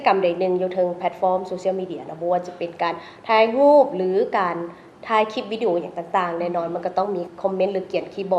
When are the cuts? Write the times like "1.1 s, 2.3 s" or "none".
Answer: 7.3 s